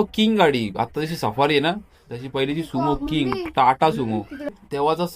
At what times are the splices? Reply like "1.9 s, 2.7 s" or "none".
none

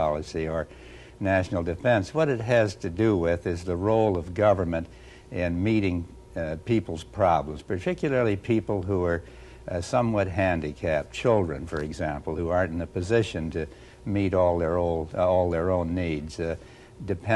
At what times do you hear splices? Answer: 14.5 s

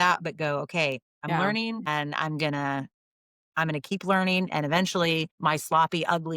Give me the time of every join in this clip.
1.1 s, 5.3 s

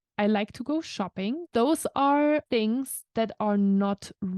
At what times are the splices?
1.4 s, 2.5 s

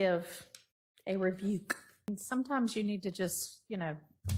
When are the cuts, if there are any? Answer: 2.2 s

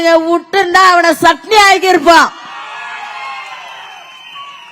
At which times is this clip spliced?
none

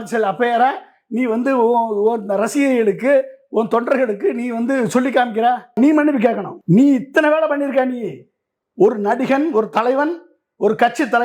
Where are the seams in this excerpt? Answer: 5.8 s, 6.5 s

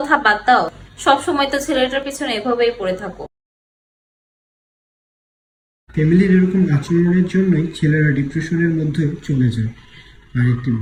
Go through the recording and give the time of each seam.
none

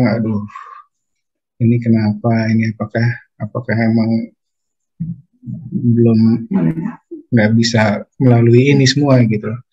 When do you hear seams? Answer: none

